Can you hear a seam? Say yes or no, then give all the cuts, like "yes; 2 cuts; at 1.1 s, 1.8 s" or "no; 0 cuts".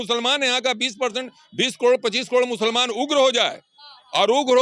no; 0 cuts